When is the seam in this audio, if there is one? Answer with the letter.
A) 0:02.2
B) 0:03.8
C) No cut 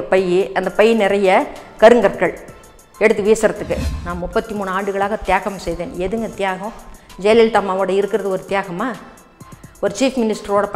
B